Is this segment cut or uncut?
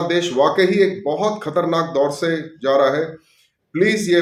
uncut